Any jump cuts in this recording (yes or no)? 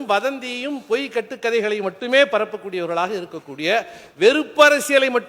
no